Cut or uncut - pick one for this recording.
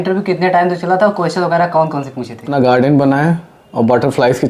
cut